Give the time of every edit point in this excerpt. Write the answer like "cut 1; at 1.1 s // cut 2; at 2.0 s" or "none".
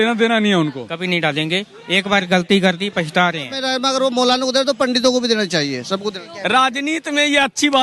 cut 1; at 0.9 s // cut 2; at 3.6 s // cut 3; at 6.3 s